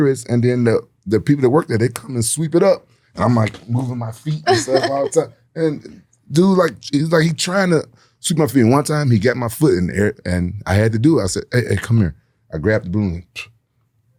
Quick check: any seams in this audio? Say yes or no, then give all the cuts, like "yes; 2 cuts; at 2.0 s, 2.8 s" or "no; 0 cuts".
no; 0 cuts